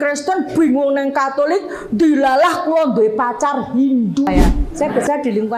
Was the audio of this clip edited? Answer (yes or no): yes